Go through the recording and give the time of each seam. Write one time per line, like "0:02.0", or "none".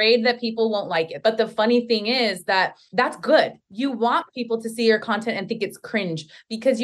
0:01.1
0:02.8
0:03.6